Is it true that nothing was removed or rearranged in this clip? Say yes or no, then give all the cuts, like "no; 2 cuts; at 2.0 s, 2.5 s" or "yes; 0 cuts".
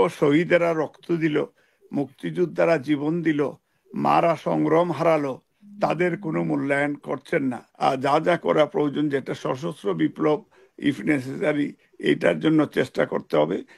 no; 1 cut; at 7.7 s